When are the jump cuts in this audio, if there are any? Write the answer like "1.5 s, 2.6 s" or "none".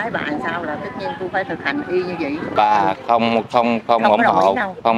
2.5 s